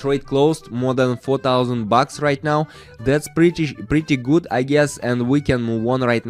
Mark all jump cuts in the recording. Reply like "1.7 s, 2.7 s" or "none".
none